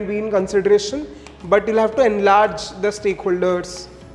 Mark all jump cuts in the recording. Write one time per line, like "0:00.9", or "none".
none